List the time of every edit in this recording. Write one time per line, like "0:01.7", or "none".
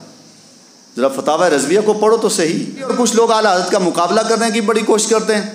0:02.9